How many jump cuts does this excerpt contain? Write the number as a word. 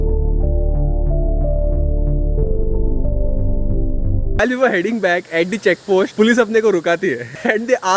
one